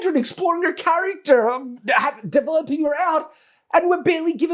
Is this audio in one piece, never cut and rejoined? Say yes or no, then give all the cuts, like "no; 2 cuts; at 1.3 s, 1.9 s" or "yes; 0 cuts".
yes; 0 cuts